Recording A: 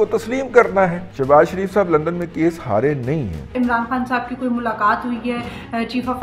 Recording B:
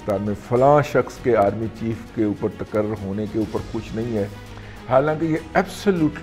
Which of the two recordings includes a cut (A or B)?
A